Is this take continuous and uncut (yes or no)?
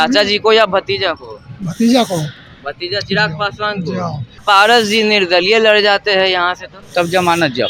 no